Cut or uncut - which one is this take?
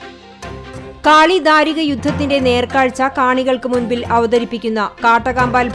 cut